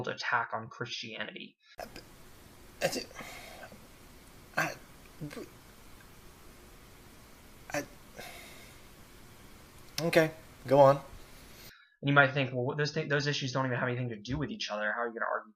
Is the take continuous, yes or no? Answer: yes